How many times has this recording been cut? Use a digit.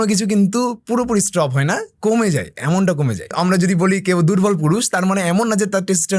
1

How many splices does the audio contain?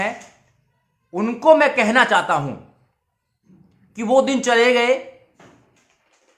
0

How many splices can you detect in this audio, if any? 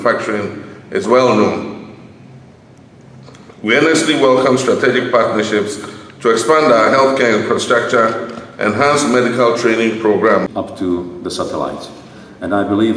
1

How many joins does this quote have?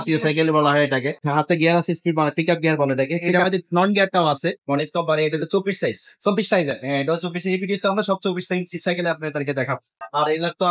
3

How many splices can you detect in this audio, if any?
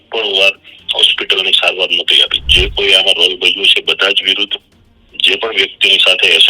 1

